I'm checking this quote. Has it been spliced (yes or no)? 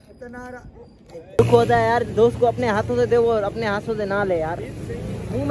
yes